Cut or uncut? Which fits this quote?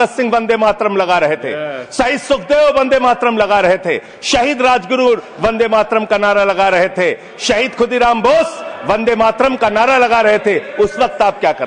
uncut